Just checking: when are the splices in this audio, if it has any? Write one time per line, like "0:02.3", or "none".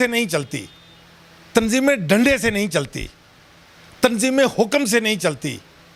none